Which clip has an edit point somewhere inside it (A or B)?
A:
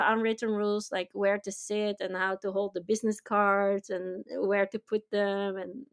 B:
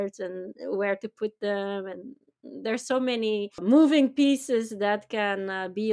B